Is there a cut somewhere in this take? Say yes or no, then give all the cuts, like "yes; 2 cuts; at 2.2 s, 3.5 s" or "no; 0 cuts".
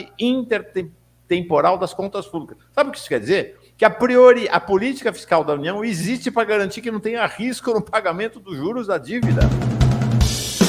yes; 1 cut; at 9.2 s